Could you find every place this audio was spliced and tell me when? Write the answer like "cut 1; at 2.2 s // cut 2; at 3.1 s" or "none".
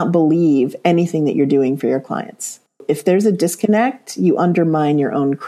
none